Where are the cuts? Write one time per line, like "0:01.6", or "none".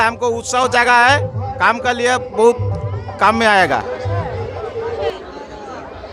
0:05.1